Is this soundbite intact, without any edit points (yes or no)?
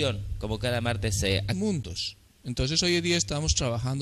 yes